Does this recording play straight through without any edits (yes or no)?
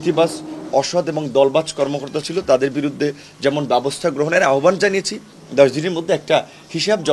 no